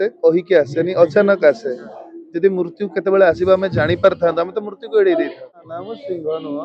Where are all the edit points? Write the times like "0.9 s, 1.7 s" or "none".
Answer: 5.7 s